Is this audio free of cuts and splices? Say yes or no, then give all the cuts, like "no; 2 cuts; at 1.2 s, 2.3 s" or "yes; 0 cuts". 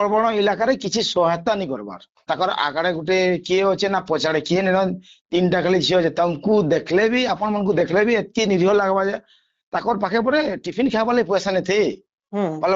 no; 1 cut; at 2.2 s